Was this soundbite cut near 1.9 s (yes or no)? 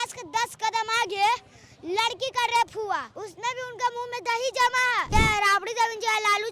no